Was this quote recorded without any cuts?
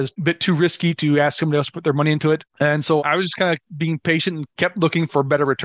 yes; 0 cuts

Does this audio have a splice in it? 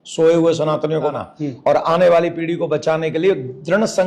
yes; 1 cut; at 1.1 s

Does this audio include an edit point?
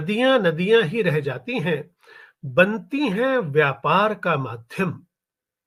no; 0 cuts

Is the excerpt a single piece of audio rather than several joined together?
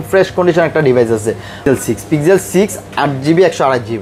no; 1 cut; at 1.6 s

